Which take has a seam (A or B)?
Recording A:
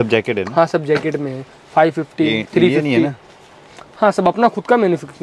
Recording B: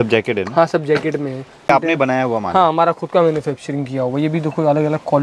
B